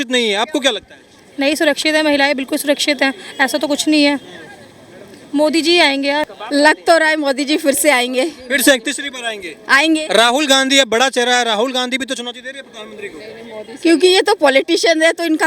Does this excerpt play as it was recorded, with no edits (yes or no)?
no